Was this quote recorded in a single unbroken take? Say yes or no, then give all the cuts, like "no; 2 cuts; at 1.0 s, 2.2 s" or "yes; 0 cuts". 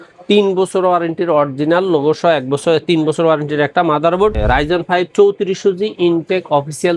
no; 1 cut; at 4.4 s